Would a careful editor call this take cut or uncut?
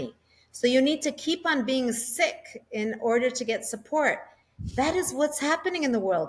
uncut